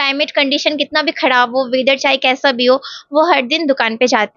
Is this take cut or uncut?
uncut